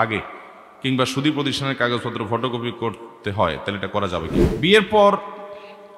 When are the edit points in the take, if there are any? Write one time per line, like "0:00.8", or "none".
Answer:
0:04.5